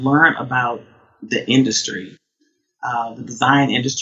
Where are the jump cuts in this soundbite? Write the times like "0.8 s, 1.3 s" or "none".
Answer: none